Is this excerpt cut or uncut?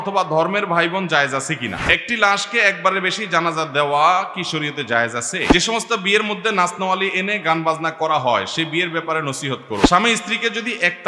cut